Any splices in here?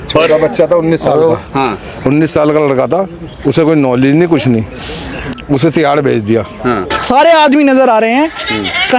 yes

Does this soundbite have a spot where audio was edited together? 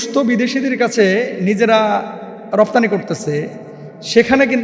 no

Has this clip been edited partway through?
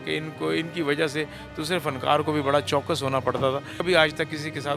yes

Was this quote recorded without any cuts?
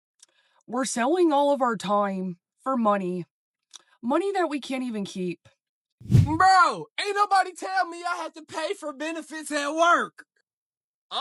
no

